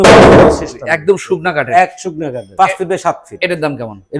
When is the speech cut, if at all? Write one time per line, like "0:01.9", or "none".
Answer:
0:02.5